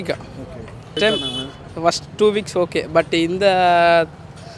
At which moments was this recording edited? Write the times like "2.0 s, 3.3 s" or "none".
0.9 s